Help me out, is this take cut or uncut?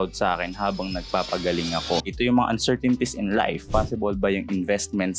cut